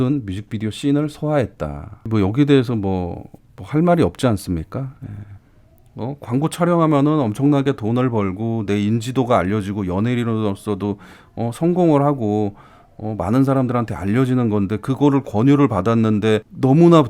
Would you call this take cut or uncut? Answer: cut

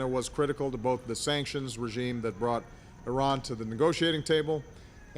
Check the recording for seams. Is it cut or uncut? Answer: cut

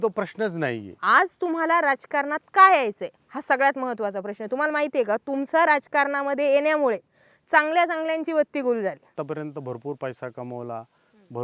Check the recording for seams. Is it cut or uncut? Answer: cut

